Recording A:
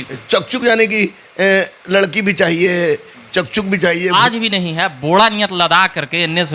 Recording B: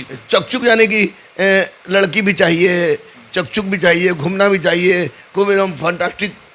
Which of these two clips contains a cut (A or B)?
A